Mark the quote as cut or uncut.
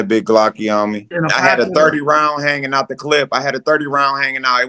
cut